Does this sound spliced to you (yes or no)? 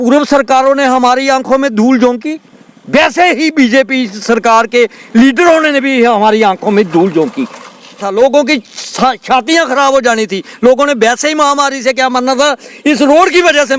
yes